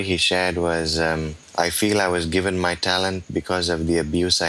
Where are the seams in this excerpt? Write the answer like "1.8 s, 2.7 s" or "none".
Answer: none